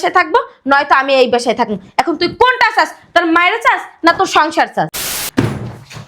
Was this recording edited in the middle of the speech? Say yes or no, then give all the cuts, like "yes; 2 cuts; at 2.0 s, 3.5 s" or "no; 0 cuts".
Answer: yes; 1 cut; at 5.0 s